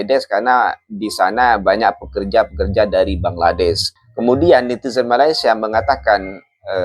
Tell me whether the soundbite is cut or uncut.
uncut